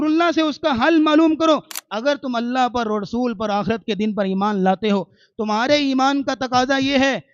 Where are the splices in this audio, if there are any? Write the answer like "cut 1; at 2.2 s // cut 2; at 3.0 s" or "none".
cut 1; at 1.8 s